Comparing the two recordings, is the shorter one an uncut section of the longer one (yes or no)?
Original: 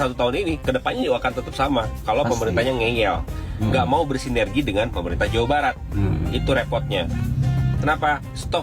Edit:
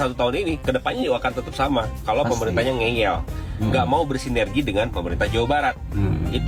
yes